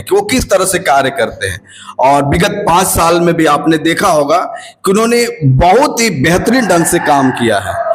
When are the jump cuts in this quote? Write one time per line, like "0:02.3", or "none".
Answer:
none